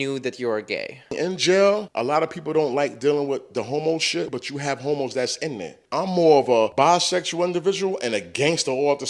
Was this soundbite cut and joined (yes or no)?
yes